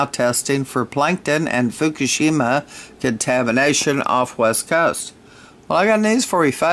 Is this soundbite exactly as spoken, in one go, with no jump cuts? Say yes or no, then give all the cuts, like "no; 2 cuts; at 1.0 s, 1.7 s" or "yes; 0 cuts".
yes; 0 cuts